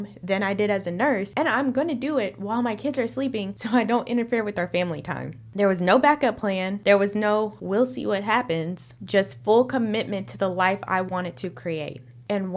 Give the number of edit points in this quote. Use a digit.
0